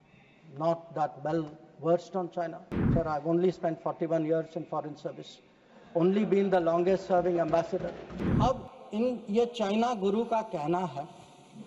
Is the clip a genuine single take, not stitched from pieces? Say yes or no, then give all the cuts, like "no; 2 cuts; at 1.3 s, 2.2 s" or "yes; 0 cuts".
no; 1 cut; at 8.2 s